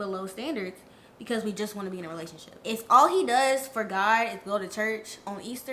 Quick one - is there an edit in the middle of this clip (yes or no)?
yes